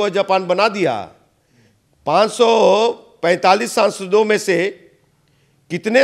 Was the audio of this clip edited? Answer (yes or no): no